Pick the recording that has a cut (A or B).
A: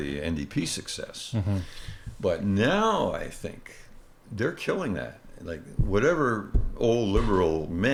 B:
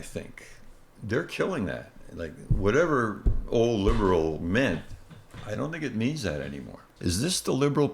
B